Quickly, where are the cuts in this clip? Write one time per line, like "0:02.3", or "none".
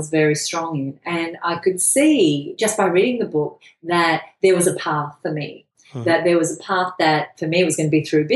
0:02.5